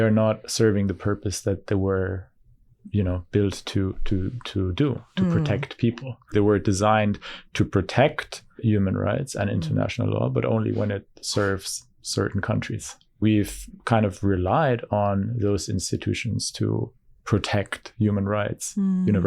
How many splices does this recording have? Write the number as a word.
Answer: three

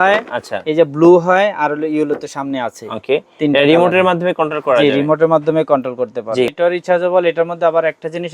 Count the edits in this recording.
one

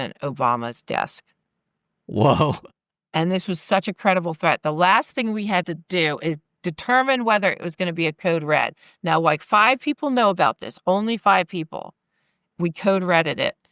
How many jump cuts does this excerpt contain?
two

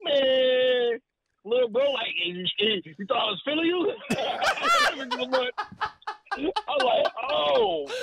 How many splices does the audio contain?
zero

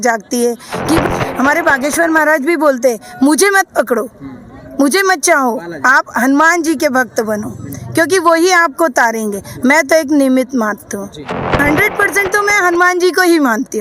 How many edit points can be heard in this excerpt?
two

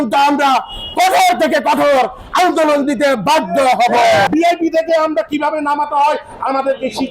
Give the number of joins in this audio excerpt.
one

